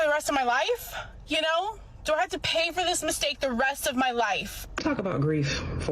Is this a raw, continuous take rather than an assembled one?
no; 2 cuts; at 2.5 s, 4.8 s

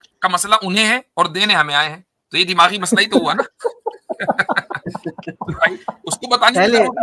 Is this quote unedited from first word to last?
yes; 0 cuts

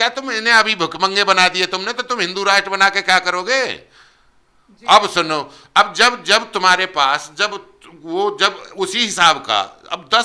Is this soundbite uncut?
yes; 0 cuts

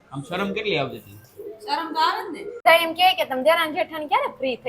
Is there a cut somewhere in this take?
yes; 1 cut; at 2.6 s

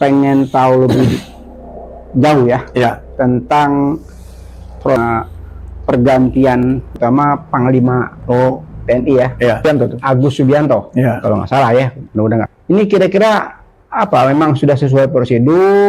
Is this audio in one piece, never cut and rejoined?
no; 4 cuts; at 4.8 s, 6.9 s, 9.6 s, 12.5 s

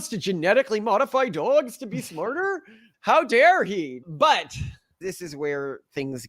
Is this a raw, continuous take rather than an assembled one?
no; 2 cuts; at 3.9 s, 5.0 s

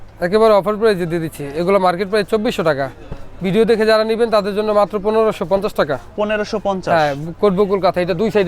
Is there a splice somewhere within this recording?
no; 0 cuts

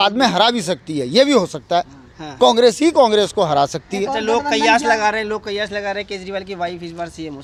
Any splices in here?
no; 0 cuts

